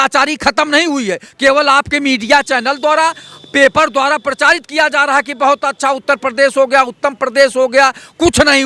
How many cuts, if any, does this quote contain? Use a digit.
0